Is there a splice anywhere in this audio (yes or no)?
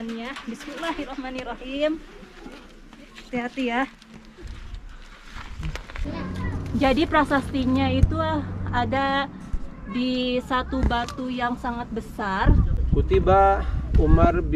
yes